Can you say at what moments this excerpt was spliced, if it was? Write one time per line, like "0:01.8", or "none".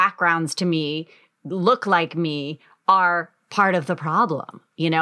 none